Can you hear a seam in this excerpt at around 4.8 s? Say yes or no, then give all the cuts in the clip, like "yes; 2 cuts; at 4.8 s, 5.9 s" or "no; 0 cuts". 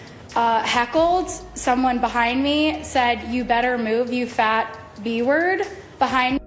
no; 0 cuts